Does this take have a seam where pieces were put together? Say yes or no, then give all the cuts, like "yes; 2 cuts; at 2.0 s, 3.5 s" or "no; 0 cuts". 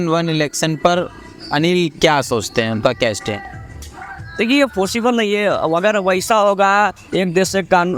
no; 0 cuts